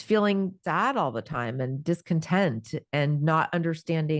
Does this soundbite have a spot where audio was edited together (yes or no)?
no